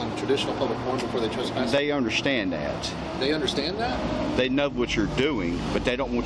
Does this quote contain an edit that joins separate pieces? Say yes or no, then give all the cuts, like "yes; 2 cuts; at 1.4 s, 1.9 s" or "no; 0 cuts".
no; 0 cuts